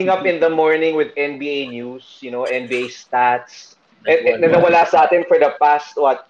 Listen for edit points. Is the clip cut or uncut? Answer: cut